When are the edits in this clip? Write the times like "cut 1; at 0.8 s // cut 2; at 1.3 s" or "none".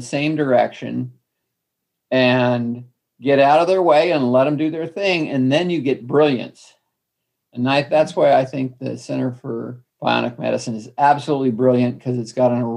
cut 1; at 9.8 s